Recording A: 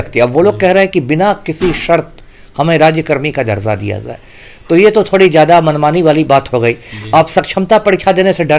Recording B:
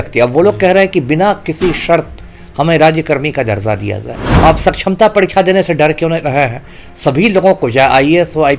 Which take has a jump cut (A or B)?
B